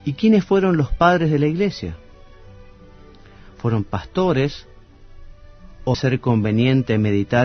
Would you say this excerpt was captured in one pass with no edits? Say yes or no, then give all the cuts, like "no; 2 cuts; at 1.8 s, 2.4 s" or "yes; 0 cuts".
yes; 0 cuts